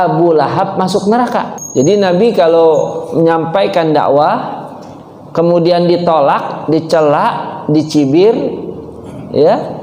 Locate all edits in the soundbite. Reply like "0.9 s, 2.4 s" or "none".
1.6 s